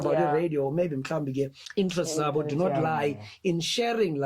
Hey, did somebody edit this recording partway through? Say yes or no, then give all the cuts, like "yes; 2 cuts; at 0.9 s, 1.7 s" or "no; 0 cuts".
yes; 1 cut; at 1.6 s